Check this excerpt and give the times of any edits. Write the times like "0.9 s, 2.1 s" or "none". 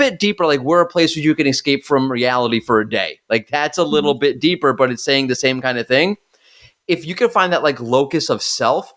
none